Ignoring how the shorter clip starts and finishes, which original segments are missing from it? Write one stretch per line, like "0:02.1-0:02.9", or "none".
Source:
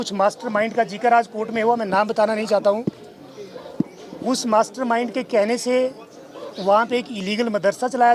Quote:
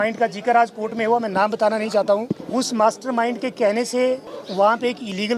0:03.0-0:04.1
0:06.1-0:06.4